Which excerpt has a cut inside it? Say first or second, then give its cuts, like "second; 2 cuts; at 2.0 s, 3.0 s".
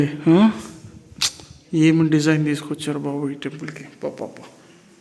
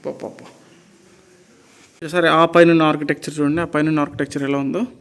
second; 1 cut; at 2.0 s